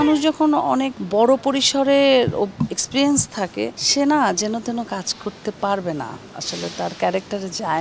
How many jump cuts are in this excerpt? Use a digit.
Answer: 2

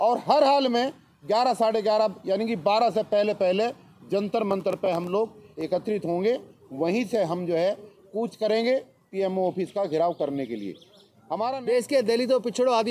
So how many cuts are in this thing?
1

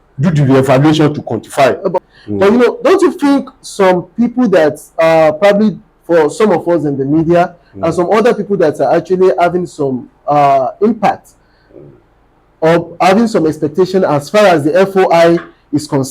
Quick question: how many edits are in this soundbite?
1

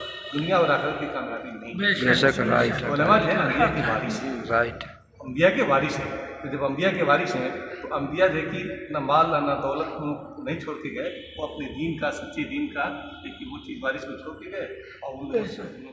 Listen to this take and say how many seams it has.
0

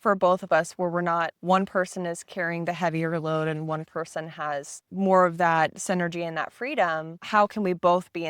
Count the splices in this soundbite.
3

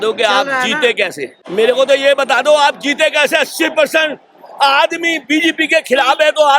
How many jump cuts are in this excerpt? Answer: 1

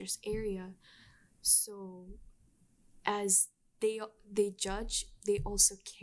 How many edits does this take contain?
0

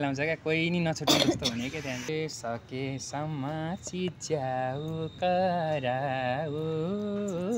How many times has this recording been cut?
1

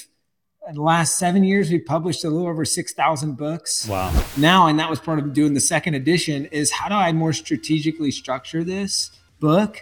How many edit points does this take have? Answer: 1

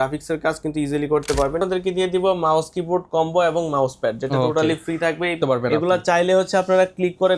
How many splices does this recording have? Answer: 2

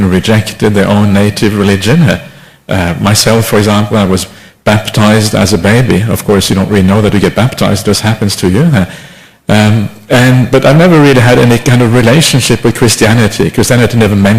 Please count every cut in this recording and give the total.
1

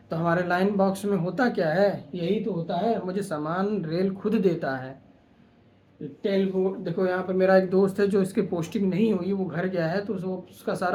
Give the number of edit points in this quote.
0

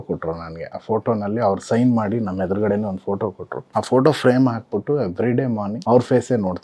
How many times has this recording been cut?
2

